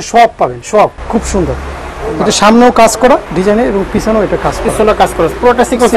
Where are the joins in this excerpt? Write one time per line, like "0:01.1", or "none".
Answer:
0:01.0
0:03.3